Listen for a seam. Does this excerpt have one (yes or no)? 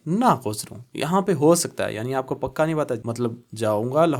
yes